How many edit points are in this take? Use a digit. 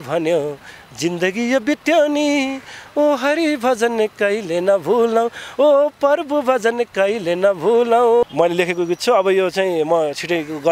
1